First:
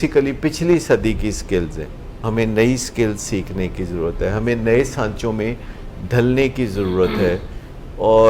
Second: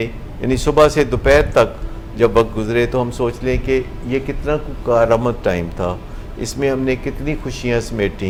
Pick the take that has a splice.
first; 1 cut; at 2.2 s

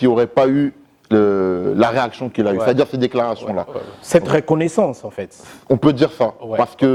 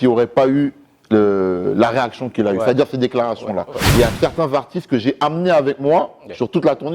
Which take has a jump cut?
second; 1 cut; at 3.8 s

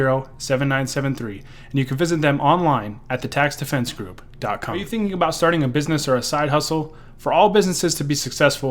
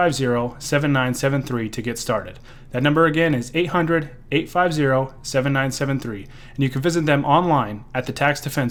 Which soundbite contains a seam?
first; 1 cut; at 4.8 s

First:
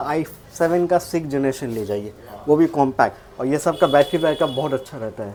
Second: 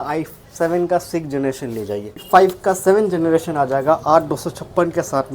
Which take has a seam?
second; 1 cut; at 2.2 s

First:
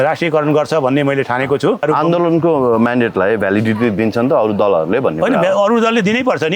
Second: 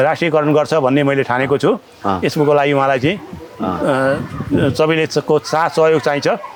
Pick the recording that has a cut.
first; 1 cut; at 1.8 s

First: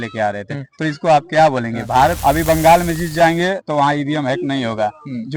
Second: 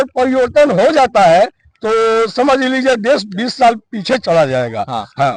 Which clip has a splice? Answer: first; 1 cut; at 2.2 s

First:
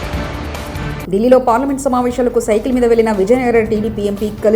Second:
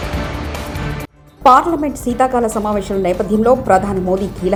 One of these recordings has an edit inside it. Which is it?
first; 1 cut; at 0.9 s

